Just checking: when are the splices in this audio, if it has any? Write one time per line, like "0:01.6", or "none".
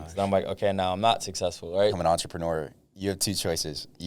0:02.0